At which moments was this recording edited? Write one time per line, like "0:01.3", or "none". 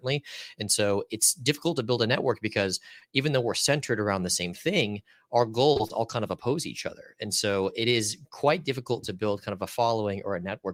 none